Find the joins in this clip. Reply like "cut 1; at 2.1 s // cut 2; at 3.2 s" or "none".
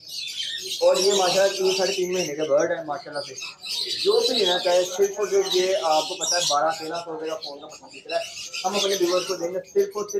none

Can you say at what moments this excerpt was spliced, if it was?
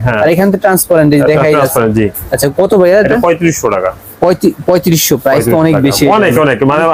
none

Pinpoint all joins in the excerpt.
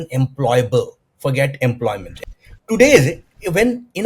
cut 1; at 2.1 s

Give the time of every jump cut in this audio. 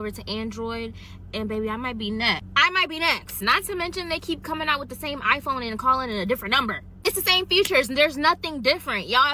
none

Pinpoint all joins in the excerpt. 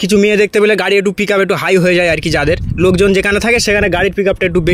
none

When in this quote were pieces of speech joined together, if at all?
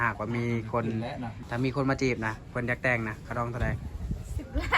cut 1; at 1.4 s

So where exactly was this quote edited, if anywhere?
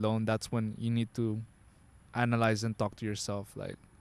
none

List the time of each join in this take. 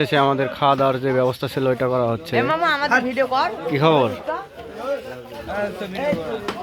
none

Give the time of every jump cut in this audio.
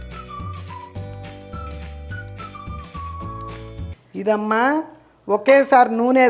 cut 1; at 4.0 s

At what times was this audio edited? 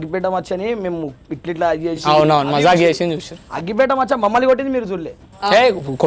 none

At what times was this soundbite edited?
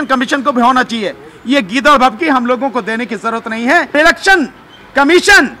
cut 1; at 3.9 s

